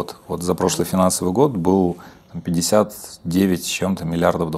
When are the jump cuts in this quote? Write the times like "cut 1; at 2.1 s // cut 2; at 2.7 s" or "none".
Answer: none